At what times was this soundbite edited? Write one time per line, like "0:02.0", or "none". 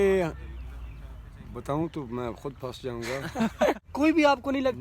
0:03.8